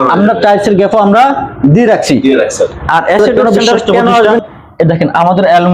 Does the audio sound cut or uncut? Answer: cut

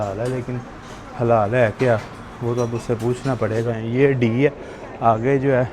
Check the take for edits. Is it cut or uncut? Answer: cut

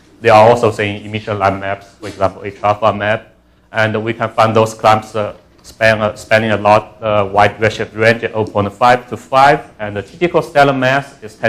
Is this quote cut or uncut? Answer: cut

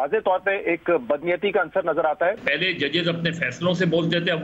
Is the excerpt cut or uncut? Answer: cut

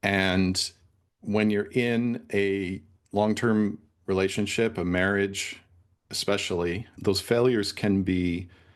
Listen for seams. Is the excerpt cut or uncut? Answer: uncut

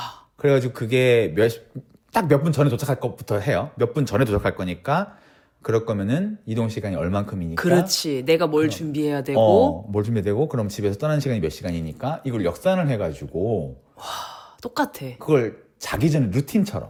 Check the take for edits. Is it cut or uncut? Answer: uncut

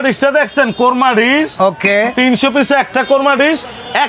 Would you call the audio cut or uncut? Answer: uncut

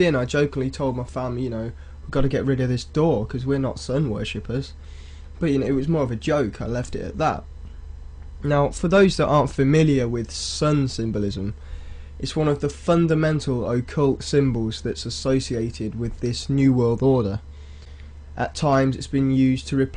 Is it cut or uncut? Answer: uncut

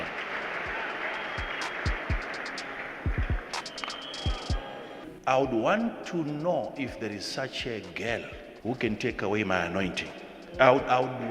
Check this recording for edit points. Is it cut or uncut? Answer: cut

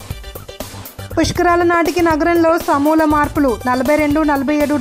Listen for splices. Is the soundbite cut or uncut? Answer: cut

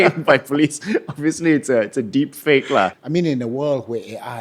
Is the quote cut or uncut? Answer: cut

